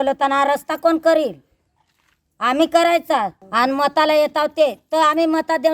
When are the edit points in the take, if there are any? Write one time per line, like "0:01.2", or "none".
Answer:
0:03.4